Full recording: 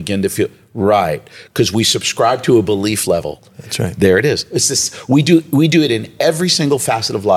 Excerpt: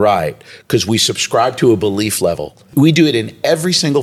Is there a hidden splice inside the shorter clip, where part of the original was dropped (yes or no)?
yes